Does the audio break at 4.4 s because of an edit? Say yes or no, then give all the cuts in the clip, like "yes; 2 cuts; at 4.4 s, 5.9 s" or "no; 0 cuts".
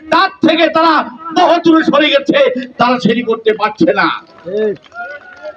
no; 0 cuts